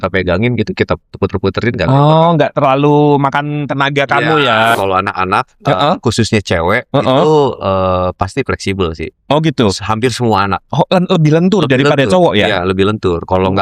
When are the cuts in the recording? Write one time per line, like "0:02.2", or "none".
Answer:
0:04.7